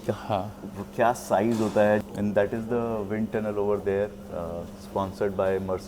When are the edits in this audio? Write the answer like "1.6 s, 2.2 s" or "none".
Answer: 2.0 s

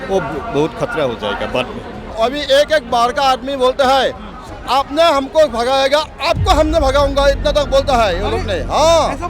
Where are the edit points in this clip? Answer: 2.1 s

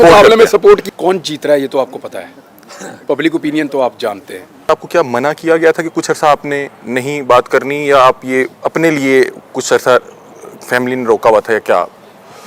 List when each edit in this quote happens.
0.8 s, 4.7 s

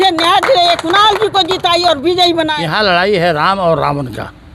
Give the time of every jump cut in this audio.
2.5 s

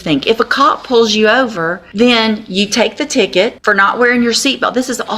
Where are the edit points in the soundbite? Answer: 1.8 s, 3.6 s

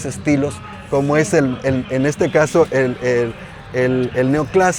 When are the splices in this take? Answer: none

